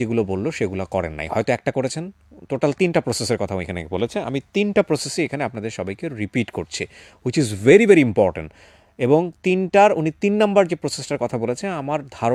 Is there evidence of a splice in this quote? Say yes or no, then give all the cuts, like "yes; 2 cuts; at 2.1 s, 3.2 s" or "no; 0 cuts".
no; 0 cuts